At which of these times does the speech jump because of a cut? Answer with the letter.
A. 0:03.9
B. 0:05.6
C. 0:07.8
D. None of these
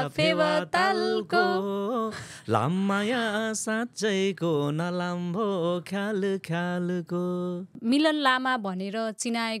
C